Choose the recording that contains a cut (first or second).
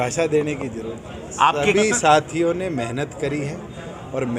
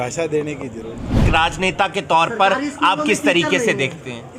second